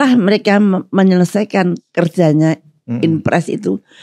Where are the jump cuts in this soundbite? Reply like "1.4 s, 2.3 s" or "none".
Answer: 1.8 s